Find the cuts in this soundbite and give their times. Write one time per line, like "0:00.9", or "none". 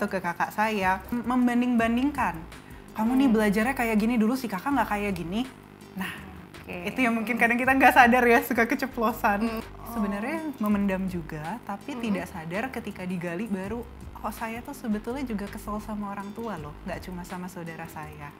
0:01.2
0:09.6